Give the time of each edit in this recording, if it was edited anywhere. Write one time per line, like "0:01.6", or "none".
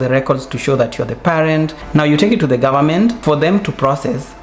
none